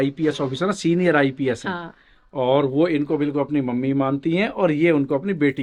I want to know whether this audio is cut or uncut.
uncut